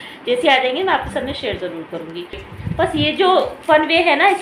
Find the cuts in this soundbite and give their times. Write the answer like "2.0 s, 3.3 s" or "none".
2.5 s